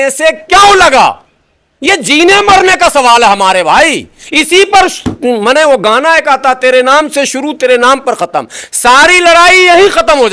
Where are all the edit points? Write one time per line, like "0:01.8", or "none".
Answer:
none